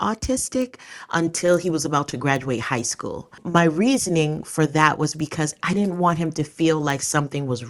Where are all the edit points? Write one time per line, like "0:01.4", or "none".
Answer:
0:03.4